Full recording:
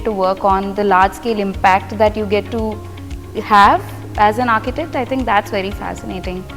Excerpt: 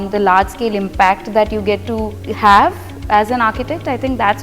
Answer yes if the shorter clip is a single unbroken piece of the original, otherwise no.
no